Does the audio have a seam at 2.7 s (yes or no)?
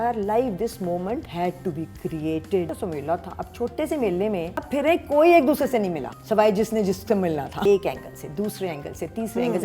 yes